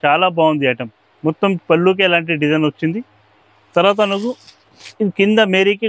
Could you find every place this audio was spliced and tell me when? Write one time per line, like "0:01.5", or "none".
none

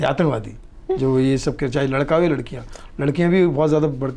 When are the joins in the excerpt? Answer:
none

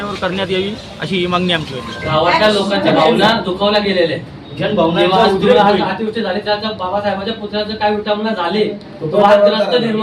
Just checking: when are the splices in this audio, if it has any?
0:02.0

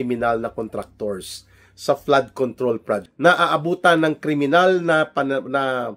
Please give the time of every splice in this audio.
0:03.1

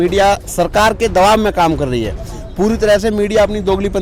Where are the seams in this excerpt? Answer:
none

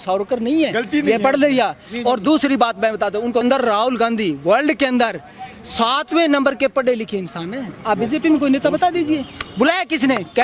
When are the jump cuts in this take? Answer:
0:03.4

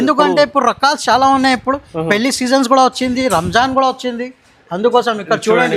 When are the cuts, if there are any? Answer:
none

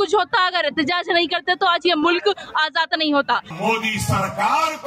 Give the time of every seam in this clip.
0:03.5

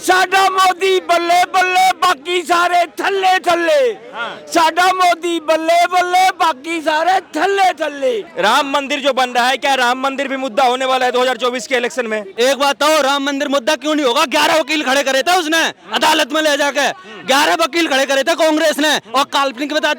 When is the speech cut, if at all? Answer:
0:08.3
0:12.3

